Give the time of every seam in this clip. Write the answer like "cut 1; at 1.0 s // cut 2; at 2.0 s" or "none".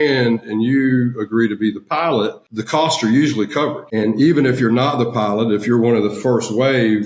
cut 1; at 2.5 s // cut 2; at 3.8 s

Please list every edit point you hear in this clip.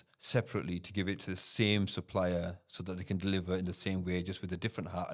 none

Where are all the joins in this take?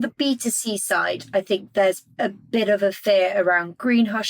cut 1; at 2.1 s

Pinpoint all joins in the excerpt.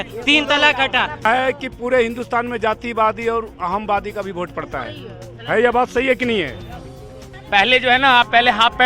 cut 1; at 1.2 s // cut 2; at 7.3 s

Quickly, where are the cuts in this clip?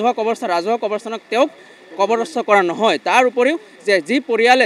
none

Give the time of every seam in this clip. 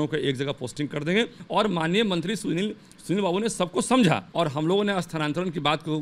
cut 1; at 1.4 s // cut 2; at 4.3 s

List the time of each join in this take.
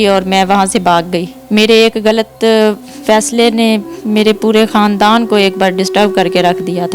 cut 1; at 1.3 s

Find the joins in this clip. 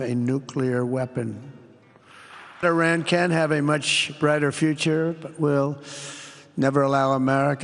cut 1; at 2.6 s

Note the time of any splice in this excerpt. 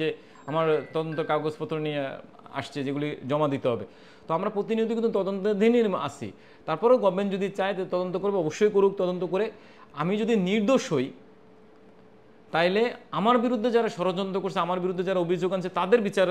none

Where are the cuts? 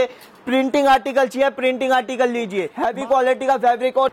cut 1; at 2.7 s

